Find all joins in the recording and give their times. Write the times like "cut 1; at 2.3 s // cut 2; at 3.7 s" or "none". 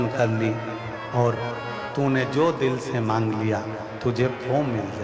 none